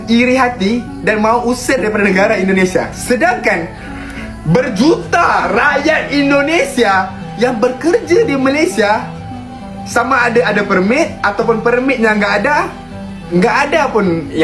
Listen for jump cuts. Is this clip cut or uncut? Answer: uncut